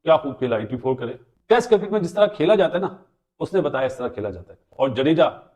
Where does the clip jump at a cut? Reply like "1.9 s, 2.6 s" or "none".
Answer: 4.6 s

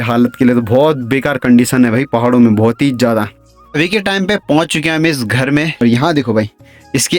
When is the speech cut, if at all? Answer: 3.7 s, 5.7 s

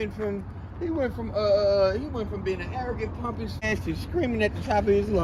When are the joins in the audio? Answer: 3.6 s

